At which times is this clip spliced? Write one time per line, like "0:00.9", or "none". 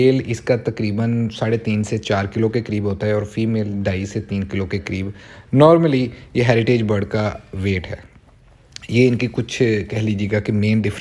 none